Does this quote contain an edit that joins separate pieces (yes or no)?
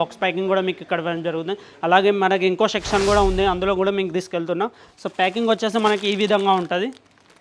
no